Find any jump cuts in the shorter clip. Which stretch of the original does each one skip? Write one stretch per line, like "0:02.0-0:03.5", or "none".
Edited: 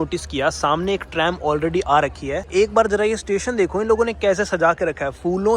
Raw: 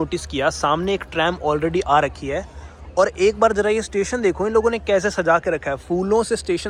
0:02.5-0:03.1